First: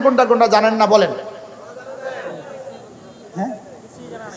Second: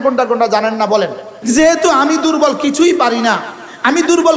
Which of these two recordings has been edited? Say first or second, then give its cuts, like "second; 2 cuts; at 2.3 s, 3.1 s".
second; 1 cut; at 1.3 s